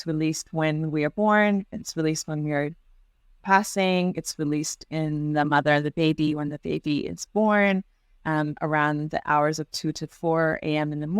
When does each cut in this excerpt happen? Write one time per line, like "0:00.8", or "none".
none